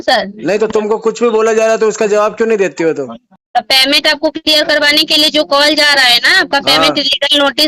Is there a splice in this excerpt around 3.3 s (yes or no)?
yes